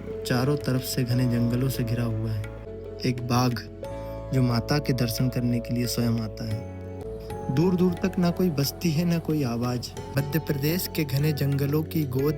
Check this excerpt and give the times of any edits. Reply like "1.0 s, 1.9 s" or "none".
2.7 s, 7.0 s, 10.1 s